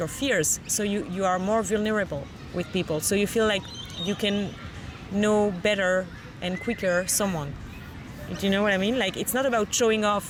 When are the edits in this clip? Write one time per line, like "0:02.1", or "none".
none